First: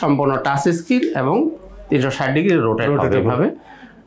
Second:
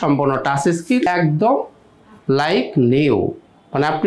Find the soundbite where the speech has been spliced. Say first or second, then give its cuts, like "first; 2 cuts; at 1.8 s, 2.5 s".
second; 1 cut; at 1.1 s